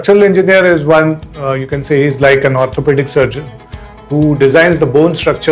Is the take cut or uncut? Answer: uncut